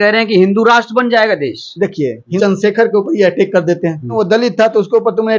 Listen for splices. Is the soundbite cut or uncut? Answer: cut